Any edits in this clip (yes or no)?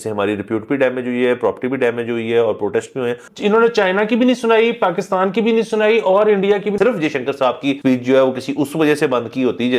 yes